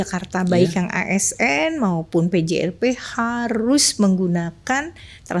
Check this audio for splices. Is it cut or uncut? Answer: uncut